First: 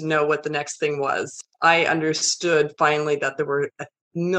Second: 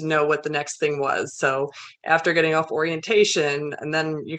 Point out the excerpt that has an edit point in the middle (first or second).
first